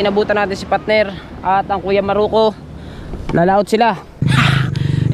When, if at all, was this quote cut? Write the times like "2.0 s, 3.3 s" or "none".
4.2 s